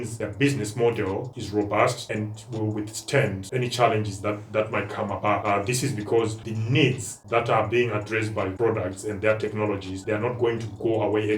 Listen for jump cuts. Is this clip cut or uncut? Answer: cut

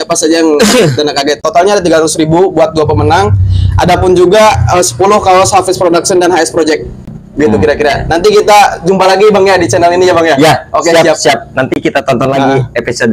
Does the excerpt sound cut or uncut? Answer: uncut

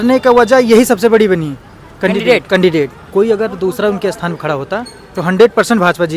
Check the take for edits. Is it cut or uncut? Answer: cut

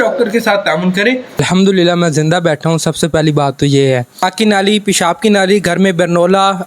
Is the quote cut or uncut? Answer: cut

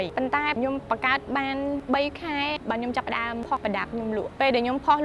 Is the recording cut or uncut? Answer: uncut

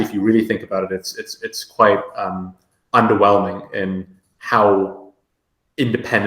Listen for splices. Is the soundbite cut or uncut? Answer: uncut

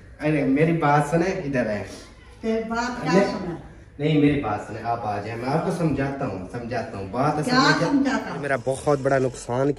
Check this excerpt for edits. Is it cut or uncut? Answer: cut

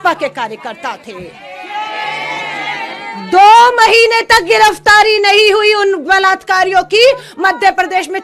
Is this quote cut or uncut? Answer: uncut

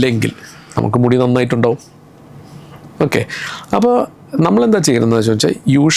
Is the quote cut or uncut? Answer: uncut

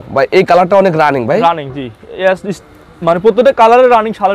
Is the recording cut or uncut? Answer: uncut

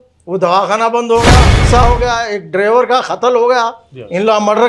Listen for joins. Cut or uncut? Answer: cut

